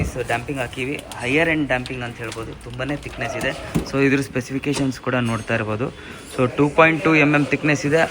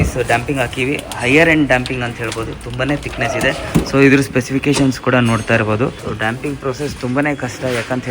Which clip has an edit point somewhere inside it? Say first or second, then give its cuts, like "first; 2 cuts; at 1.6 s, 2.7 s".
second; 1 cut; at 6.0 s